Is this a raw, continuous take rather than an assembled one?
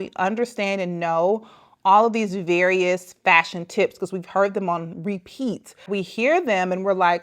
no; 1 cut; at 5.8 s

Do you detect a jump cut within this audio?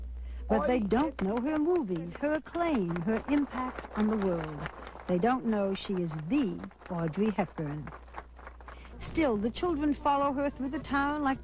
no; 0 cuts

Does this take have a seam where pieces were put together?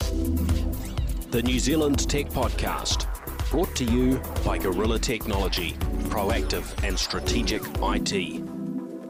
no; 0 cuts

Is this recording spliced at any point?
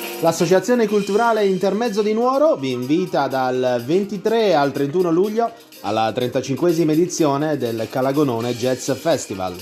no; 0 cuts

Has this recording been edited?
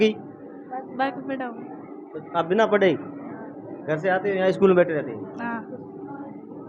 no; 0 cuts

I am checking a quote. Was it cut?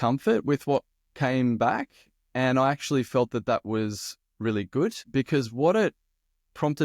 yes; 1 cut; at 5.0 s

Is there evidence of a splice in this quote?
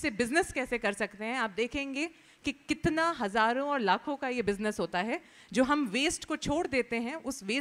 no; 0 cuts

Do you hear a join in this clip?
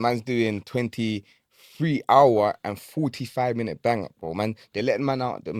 no; 0 cuts

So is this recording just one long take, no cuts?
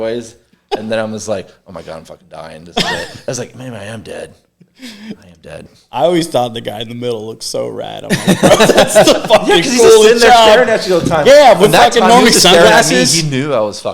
no; 2 cuts; at 5.8 s, 8.8 s

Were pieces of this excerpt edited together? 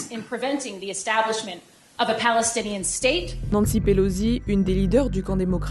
yes; 1 cut; at 3.3 s

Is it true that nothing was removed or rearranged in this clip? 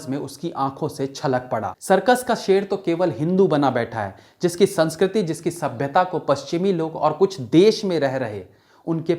no; 1 cut; at 1.7 s

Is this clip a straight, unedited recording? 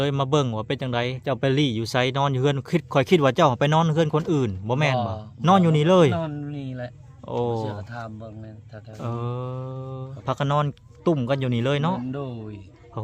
no; 2 cuts; at 1.2 s, 10.1 s

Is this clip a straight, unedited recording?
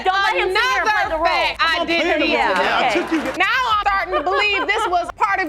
no; 1 cut; at 3.3 s

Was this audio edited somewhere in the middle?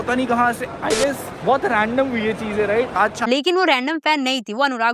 yes; 1 cut; at 3.2 s

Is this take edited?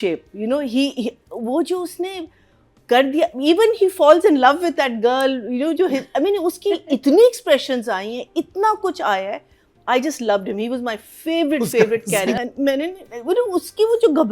yes; 1 cut; at 12.4 s

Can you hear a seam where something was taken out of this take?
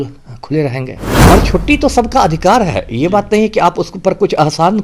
yes; 1 cut; at 1.1 s

